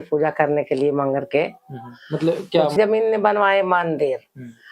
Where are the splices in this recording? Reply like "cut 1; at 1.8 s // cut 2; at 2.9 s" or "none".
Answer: cut 1; at 2.7 s